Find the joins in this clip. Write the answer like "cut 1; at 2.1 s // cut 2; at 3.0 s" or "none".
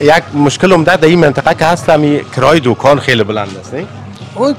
none